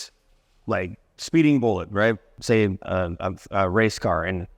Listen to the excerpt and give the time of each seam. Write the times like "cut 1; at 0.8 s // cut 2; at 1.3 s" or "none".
cut 1; at 2.3 s